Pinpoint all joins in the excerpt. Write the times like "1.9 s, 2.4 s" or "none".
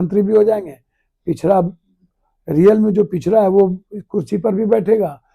none